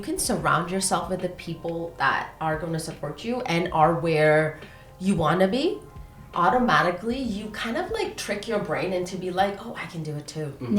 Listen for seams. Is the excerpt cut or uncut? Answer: uncut